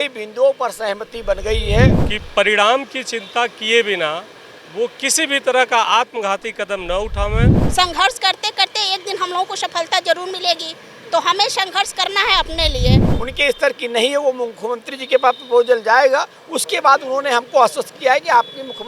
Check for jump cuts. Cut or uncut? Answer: cut